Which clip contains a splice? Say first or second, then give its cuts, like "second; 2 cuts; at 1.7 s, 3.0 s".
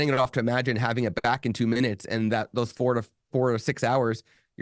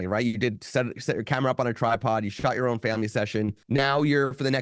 second; 1 cut; at 3.6 s